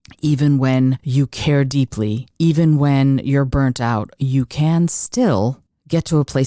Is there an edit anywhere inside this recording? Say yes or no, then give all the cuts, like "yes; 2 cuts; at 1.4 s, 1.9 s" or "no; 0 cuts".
yes; 2 cuts; at 1.0 s, 2.2 s